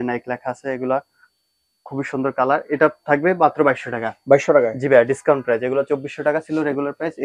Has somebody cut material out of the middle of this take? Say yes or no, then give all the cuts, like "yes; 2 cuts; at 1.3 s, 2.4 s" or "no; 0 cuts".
no; 0 cuts